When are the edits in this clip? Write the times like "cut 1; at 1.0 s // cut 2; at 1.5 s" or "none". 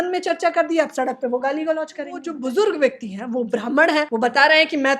cut 1; at 2.3 s // cut 2; at 4.1 s